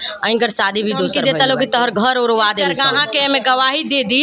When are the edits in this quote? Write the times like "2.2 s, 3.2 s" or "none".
1.1 s, 2.7 s